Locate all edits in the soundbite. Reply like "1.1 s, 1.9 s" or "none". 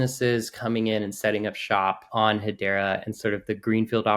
2.0 s